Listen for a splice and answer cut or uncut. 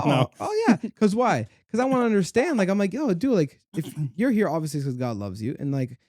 uncut